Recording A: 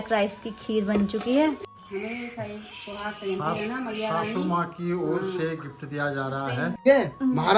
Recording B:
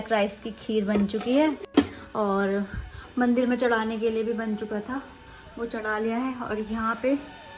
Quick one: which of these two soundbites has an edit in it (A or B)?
A